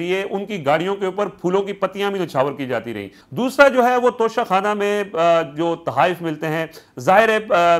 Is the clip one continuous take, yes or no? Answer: yes